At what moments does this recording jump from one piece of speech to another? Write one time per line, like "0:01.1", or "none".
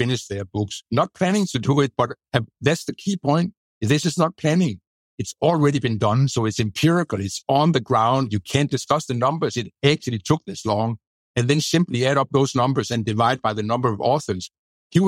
none